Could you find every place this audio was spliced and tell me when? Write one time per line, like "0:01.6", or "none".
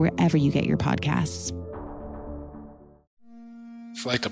0:03.0